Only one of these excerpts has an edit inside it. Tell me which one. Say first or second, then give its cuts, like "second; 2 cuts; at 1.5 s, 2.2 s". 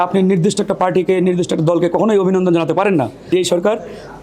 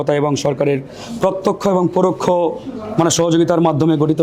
first; 1 cut; at 3.3 s